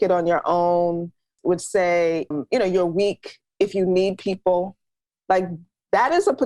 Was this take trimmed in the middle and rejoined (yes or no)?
yes